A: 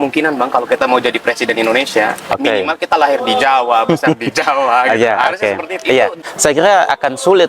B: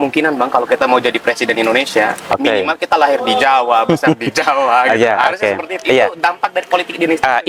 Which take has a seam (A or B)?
A